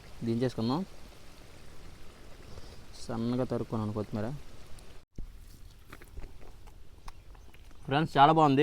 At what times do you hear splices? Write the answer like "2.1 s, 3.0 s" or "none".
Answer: 5.1 s